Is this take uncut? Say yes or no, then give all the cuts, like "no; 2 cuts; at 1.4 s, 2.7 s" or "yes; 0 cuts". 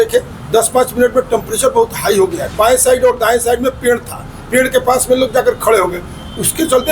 no; 1 cut; at 2.4 s